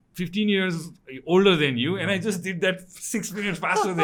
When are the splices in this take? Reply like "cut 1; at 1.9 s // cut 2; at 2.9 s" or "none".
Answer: none